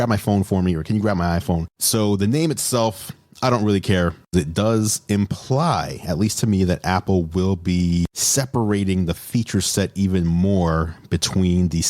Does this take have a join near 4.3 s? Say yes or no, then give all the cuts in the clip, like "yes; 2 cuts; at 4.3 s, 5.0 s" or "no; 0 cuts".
yes; 1 cut; at 4.3 s